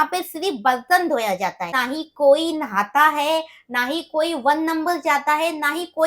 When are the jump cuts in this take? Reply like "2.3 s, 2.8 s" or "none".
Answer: 1.8 s